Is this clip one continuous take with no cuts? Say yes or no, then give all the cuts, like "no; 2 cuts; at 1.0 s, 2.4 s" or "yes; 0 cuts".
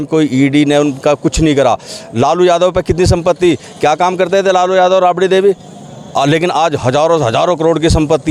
yes; 0 cuts